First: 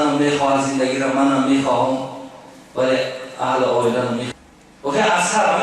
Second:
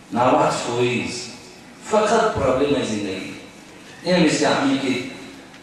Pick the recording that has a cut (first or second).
first